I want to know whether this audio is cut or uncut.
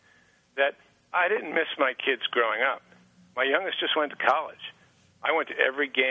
uncut